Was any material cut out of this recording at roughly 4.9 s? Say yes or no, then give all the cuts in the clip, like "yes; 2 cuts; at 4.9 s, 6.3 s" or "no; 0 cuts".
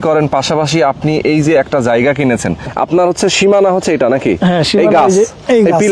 no; 1 cut; at 2.7 s